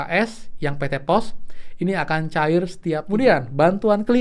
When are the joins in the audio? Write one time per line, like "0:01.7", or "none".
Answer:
0:03.0